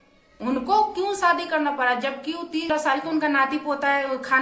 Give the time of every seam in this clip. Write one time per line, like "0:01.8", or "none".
0:02.7

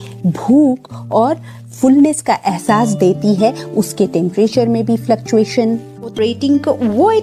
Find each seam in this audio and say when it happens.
0:06.2

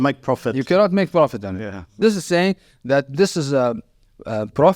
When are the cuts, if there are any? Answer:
0:01.8

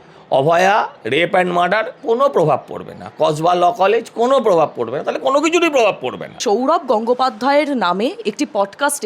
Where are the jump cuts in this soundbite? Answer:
0:06.4

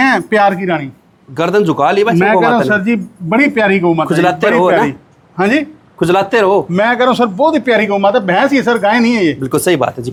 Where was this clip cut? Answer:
none

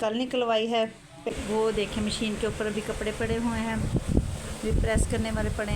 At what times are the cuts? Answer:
0:01.3

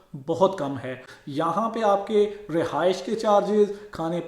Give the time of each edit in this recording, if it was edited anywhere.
0:01.1

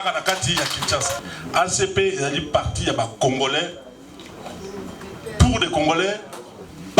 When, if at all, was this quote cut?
0:01.2

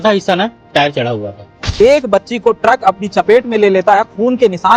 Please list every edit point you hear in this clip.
0:01.6

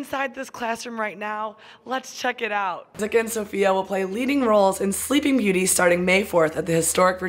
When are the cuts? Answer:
0:02.9

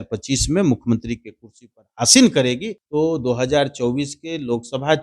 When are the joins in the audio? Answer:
0:02.7

